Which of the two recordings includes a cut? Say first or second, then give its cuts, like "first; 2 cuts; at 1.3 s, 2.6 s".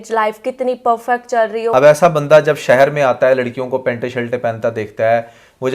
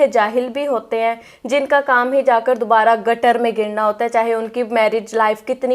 first; 1 cut; at 1.7 s